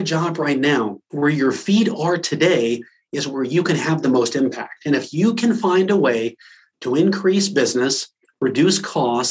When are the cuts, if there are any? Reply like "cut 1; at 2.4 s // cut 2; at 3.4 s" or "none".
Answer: cut 1; at 1.0 s